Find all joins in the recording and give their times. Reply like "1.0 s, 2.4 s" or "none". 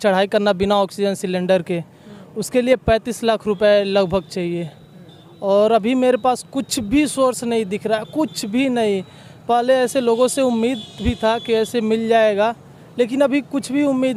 none